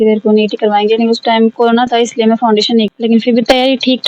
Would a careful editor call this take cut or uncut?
cut